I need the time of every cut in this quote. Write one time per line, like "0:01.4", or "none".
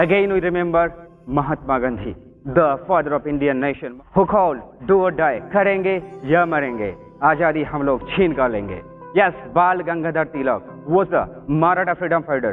0:03.8
0:08.8